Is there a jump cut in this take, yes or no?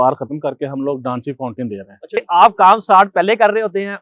yes